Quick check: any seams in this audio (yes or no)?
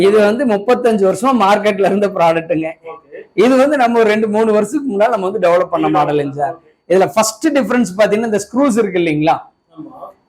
no